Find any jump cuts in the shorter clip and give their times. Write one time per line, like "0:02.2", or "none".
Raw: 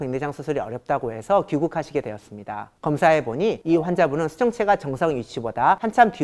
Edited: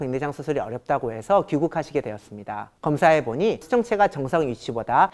0:03.6